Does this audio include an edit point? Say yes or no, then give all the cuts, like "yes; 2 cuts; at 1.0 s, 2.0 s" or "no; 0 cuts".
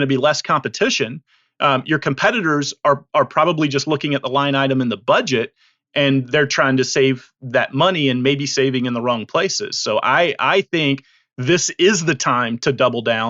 no; 0 cuts